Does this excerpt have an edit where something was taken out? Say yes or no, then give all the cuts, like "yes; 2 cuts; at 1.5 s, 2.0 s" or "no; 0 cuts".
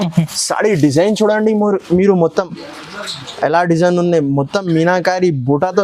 no; 0 cuts